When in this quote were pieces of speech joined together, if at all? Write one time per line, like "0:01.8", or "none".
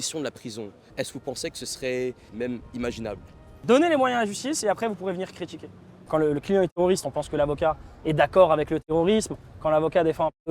0:02.3
0:03.5
0:06.1